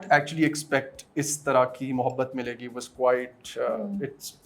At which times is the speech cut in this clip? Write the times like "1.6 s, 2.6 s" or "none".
none